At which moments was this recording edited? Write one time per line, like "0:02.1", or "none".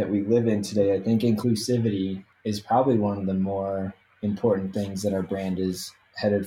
0:01.4
0:02.3